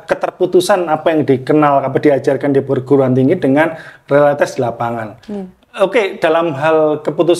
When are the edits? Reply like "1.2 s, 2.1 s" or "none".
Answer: none